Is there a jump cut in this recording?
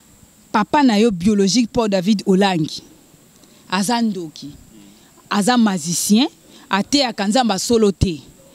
no; 0 cuts

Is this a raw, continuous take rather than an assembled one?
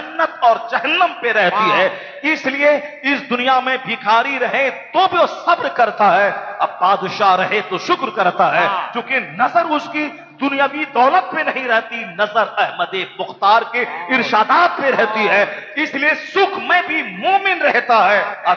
yes; 0 cuts

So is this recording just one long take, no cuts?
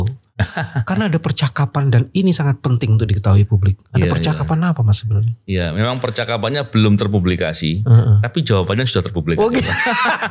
yes; 0 cuts

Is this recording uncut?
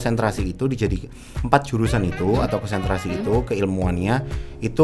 yes; 0 cuts

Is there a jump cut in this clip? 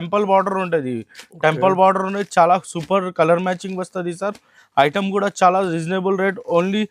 no; 0 cuts

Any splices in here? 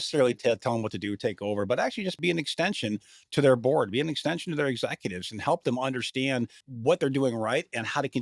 yes; 2 cuts; at 2.2 s, 6.7 s

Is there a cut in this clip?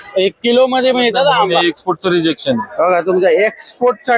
yes; 1 cut; at 1.5 s

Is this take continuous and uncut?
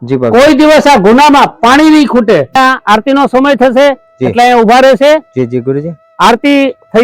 no; 1 cut; at 2.5 s

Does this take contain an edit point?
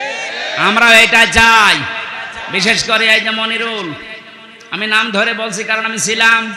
no; 0 cuts

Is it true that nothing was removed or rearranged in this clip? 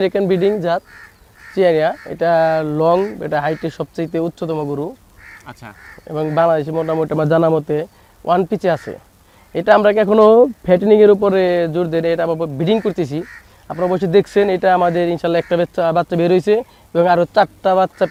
yes; 0 cuts

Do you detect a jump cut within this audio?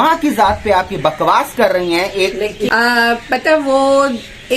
yes; 1 cut; at 2.7 s

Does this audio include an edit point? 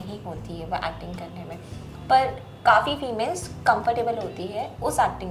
no; 0 cuts

